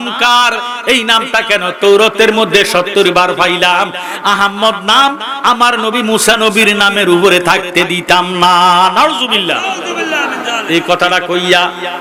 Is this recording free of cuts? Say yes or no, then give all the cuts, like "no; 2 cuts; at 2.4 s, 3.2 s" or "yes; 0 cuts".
yes; 0 cuts